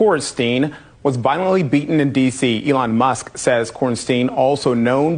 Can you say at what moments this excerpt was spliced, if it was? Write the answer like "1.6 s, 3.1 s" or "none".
none